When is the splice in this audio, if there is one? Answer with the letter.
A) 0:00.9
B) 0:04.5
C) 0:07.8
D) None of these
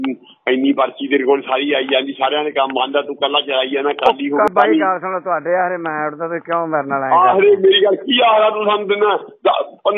B